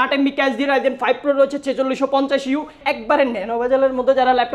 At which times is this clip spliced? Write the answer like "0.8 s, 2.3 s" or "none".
2.8 s